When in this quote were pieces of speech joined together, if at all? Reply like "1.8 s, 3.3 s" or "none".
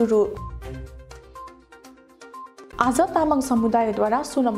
none

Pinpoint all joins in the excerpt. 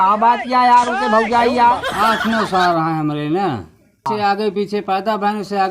4.2 s

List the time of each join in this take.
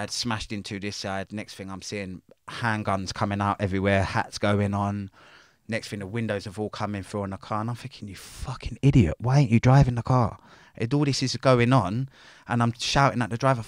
none

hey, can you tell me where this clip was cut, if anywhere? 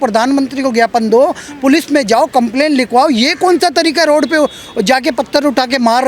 none

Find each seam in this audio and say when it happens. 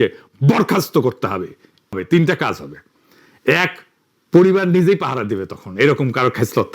1.9 s

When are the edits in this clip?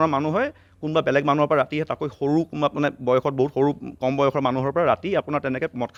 none

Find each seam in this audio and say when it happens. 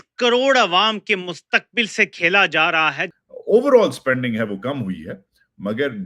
3.1 s

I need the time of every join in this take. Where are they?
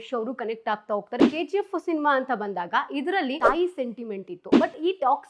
1.2 s, 3.4 s

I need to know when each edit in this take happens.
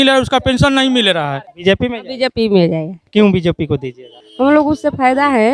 1.4 s

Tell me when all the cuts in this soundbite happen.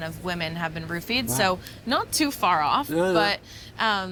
none

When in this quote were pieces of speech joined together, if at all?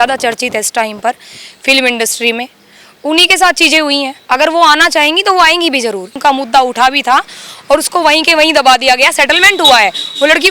4.2 s, 6.1 s

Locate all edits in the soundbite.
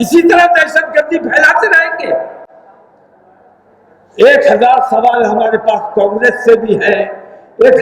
none

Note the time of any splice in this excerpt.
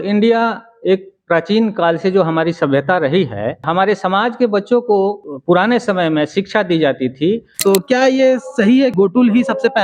3.7 s, 5.3 s, 7.6 s, 8.9 s

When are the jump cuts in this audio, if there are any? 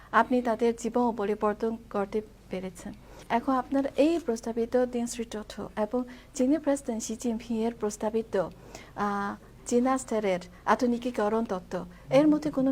3.1 s

